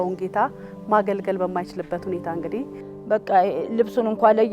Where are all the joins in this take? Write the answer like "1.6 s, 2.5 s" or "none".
2.9 s